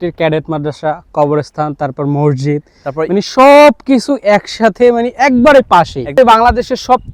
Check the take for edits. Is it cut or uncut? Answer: cut